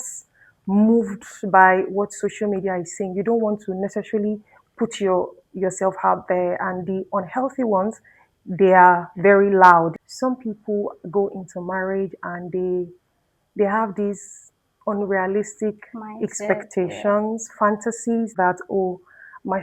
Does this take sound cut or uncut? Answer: cut